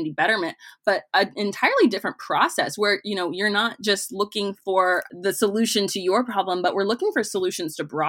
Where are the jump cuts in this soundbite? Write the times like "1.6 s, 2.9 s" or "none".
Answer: 5.1 s